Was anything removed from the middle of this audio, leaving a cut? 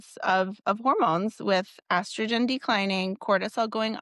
no; 0 cuts

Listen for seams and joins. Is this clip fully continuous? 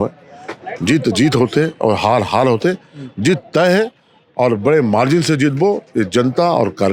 yes; 0 cuts

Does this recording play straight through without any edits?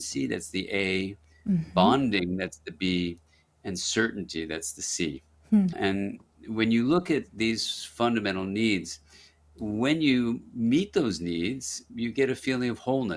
yes; 0 cuts

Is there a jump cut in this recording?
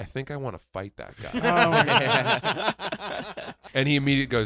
yes; 1 cut; at 3.5 s

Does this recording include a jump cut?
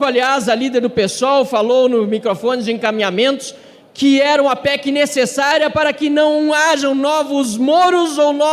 no; 0 cuts

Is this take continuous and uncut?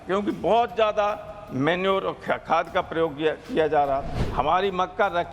no; 1 cut; at 4.2 s

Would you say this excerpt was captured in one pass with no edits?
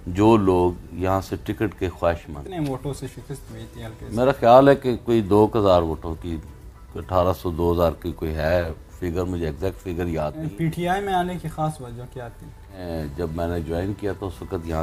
no; 3 cuts; at 2.4 s, 10.5 s, 12.9 s

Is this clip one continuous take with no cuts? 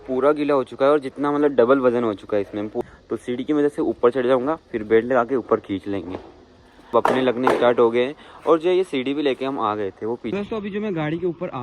no; 3 cuts; at 2.8 s, 6.9 s, 10.3 s

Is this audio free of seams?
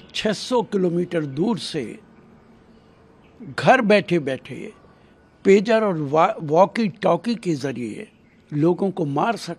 yes; 0 cuts

